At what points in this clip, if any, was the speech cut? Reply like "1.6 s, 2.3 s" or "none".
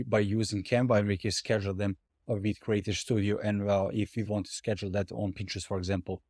none